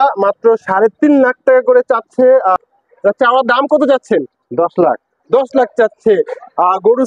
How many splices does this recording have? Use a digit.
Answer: 1